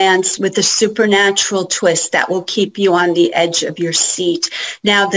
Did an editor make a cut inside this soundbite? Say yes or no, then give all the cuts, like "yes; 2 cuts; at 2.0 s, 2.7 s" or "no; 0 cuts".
no; 0 cuts